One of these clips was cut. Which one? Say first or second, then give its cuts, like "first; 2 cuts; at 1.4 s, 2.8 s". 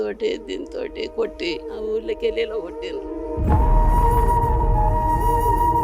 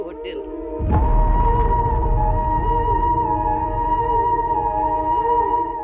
first; 1 cut; at 1.7 s